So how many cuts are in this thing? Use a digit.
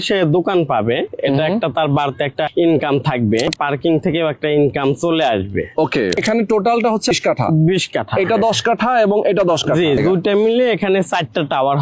5